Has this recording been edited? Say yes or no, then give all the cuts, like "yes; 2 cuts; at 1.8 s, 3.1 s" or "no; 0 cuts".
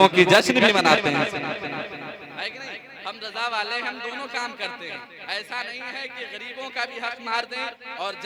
no; 0 cuts